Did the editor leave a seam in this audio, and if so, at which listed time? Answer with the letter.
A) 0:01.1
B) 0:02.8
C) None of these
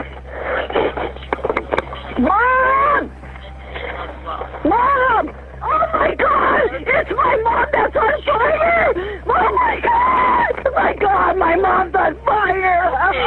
C